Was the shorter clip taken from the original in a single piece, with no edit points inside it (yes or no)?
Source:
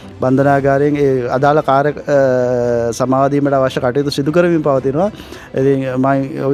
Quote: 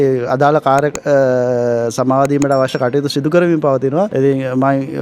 no